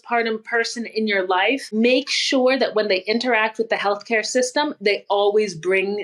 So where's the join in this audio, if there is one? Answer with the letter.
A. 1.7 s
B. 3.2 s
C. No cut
A